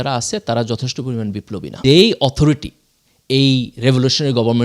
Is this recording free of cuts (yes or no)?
no